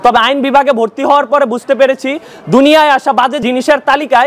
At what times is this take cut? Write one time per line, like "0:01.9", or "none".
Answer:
none